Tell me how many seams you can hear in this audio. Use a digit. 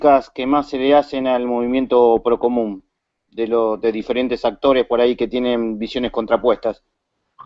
1